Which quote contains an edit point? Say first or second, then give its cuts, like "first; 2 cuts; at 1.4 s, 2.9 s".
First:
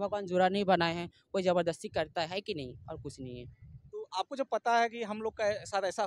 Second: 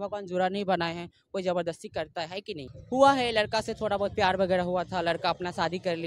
second; 1 cut; at 2.8 s